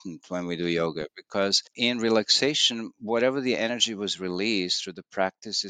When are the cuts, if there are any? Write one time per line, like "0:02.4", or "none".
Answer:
0:01.7